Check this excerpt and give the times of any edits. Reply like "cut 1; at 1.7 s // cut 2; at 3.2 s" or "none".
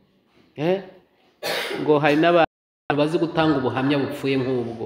cut 1; at 2.6 s